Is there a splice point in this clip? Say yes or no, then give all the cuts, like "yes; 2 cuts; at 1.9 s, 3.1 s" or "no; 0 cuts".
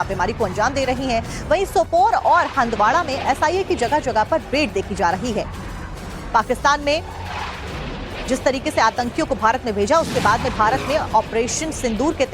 yes; 1 cut; at 3.1 s